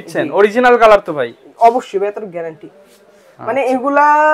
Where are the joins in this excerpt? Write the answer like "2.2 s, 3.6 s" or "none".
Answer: none